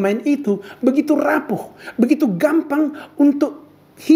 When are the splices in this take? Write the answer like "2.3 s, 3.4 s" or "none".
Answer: none